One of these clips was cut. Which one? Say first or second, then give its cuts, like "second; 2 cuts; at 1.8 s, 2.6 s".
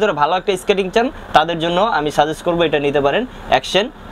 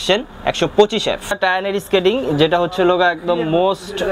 second; 1 cut; at 1.4 s